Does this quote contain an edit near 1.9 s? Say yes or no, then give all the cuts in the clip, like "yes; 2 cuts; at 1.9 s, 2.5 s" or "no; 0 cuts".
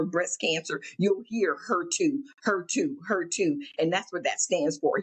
no; 0 cuts